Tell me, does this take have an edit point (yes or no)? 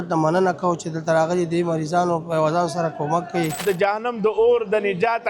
yes